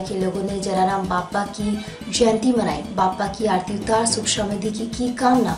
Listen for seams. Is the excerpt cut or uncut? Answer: uncut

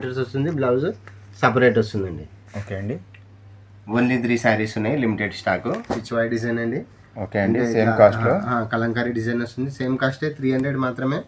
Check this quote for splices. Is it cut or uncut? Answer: cut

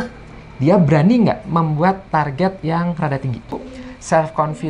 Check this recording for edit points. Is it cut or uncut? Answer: cut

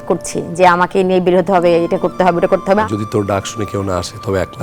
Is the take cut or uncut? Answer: cut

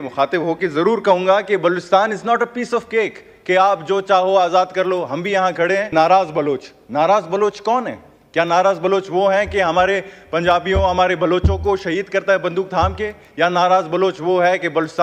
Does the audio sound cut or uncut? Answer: cut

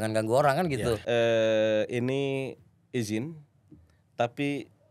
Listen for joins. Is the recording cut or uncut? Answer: cut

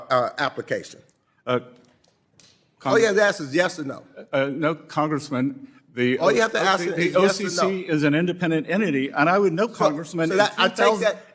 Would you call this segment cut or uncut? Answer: uncut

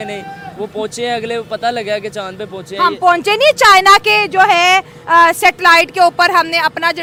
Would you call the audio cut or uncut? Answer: uncut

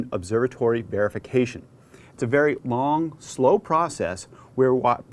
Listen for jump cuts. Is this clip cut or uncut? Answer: cut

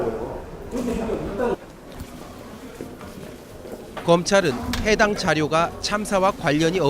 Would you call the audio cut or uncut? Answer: cut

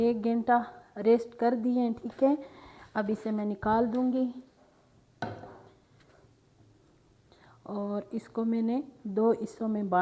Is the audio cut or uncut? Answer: uncut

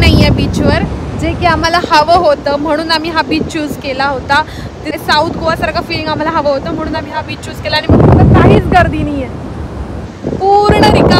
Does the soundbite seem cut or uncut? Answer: cut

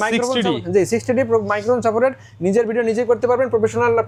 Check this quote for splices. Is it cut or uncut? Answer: uncut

